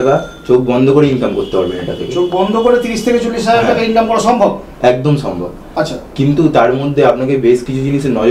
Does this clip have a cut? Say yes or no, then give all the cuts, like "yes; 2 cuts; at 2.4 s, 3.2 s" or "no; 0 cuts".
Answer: no; 0 cuts